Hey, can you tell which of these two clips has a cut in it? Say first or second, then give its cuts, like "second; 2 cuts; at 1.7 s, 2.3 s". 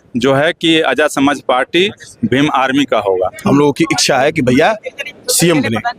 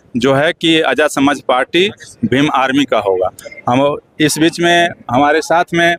first; 1 cut; at 3.4 s